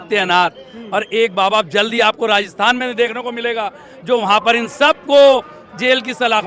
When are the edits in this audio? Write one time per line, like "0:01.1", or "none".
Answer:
none